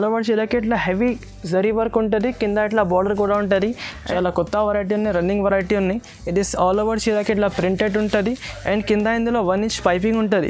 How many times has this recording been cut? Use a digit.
1